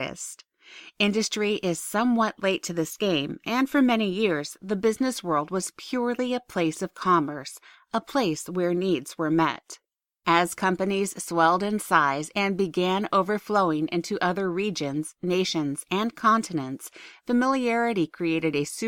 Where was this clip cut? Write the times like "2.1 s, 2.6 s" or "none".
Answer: 13.5 s